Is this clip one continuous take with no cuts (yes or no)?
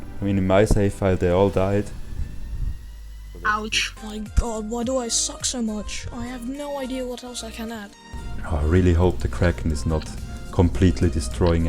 no